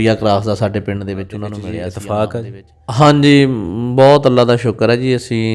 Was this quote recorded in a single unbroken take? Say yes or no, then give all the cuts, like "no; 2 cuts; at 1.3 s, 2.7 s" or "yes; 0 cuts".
no; 1 cut; at 1.8 s